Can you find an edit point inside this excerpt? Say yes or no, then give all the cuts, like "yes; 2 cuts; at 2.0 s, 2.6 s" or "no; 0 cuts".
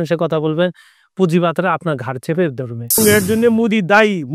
yes; 1 cut; at 3.0 s